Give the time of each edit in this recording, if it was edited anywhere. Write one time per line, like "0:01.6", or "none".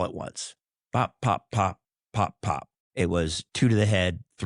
0:02.8